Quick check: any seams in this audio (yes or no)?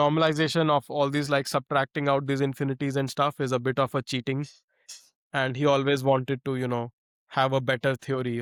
no